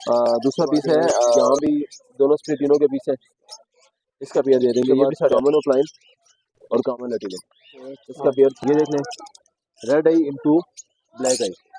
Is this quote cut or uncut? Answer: cut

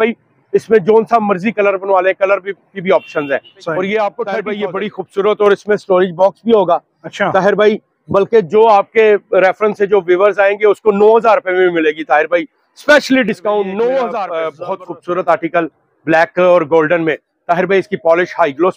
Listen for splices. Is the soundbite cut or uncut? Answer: cut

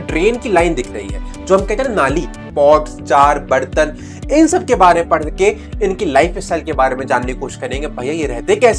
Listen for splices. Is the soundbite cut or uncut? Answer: cut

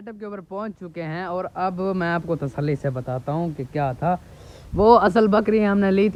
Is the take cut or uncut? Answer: uncut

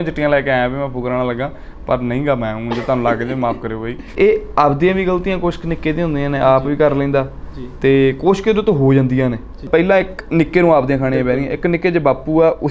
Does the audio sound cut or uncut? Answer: cut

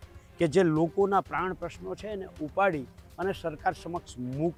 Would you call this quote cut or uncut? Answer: uncut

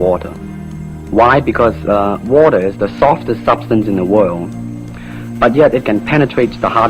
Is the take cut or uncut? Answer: cut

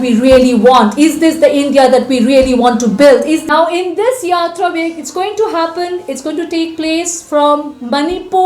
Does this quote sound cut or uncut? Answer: cut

